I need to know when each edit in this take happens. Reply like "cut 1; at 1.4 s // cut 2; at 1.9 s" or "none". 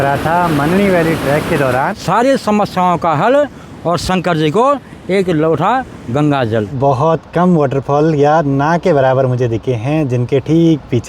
cut 1; at 1.9 s // cut 2; at 6.8 s